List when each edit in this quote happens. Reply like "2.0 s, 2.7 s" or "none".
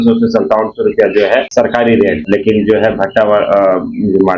1.5 s, 2.2 s